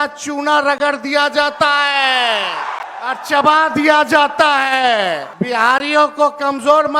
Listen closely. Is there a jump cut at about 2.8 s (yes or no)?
yes